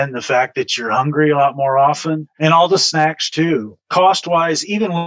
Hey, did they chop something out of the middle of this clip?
yes; 2 cuts; at 2.3 s, 3.8 s

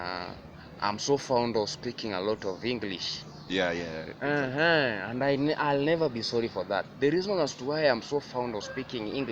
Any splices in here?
no; 0 cuts

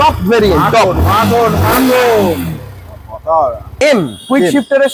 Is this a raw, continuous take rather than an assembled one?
no; 1 cut; at 3.7 s

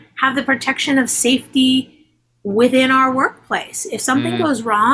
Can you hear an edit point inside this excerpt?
no; 0 cuts

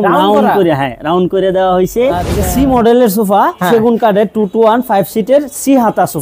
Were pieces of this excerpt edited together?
yes; 1 cut; at 2.3 s

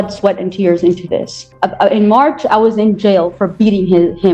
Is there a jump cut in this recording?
yes; 1 cut; at 1.4 s

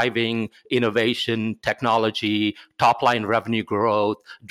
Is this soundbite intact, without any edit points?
yes; 0 cuts

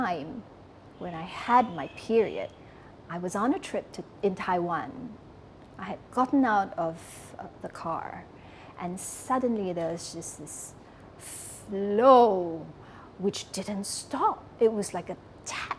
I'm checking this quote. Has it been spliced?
no; 0 cuts

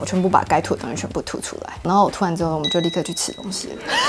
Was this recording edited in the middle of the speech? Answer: no; 0 cuts

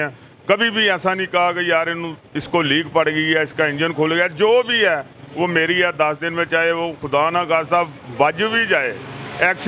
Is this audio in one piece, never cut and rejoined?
yes; 0 cuts

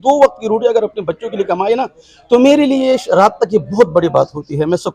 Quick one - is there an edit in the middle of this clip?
no; 0 cuts

